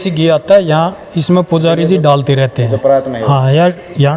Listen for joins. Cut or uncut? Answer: uncut